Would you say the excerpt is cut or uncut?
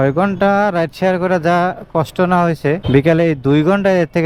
uncut